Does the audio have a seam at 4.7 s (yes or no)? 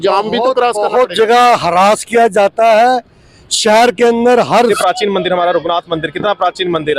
yes